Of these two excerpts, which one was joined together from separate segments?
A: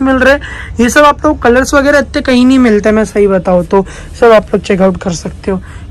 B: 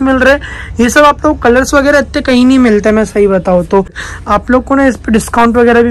B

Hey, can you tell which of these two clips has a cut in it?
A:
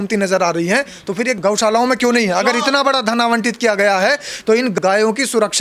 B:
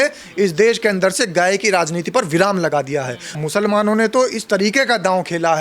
B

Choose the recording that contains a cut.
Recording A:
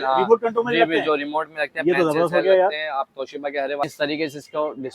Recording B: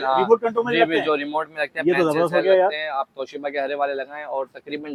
A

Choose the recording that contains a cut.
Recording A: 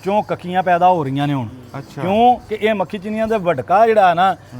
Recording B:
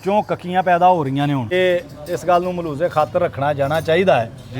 B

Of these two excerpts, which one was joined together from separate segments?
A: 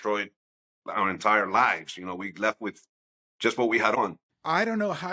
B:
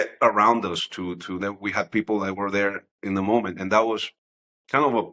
A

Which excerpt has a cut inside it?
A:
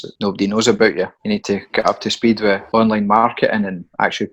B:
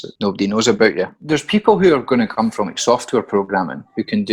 B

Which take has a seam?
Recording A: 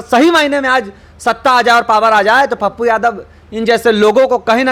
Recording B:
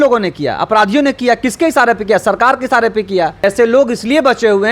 B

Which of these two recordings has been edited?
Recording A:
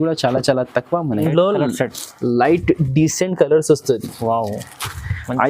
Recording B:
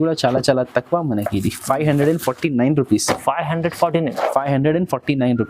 A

